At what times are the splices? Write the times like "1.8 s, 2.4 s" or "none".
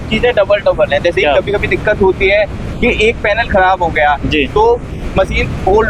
none